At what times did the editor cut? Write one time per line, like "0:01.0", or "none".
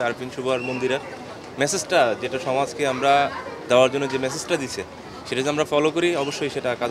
none